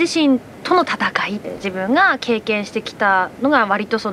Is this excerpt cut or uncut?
cut